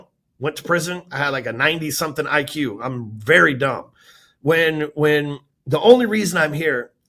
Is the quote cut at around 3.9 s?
no; 0 cuts

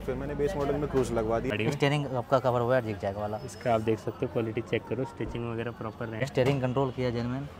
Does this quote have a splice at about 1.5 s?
yes; 2 cuts; at 1.5 s, 6.2 s

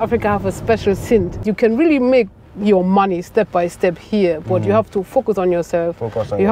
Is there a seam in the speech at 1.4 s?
yes; 1 cut; at 1.4 s

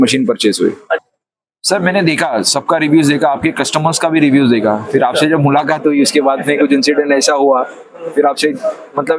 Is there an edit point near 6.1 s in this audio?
no; 1 cut; at 1.0 s

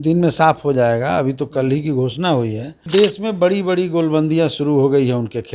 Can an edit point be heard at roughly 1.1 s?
no; 1 cut; at 2.8 s

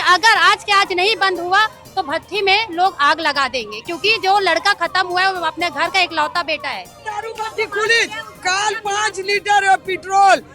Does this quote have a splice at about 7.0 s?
yes; 1 cut; at 7.0 s

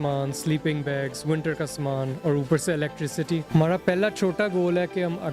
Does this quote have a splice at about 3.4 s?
yes; 1 cut; at 3.4 s

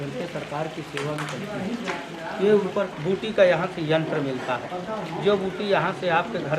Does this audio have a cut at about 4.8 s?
no; 1 cut; at 2.9 s

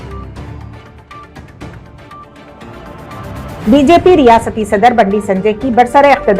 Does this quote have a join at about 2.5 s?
yes; 1 cut; at 2.5 s

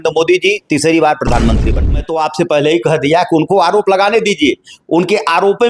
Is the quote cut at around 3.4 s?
no; 1 cut; at 1.9 s

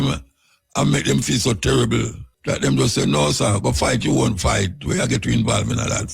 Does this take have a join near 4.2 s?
no; 1 cut; at 2.2 s

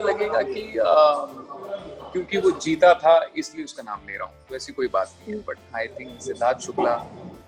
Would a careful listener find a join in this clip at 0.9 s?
no; 0 cuts

